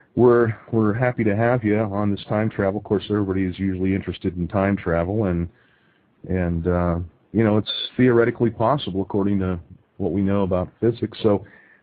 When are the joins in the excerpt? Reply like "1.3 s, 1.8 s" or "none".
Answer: 1.6 s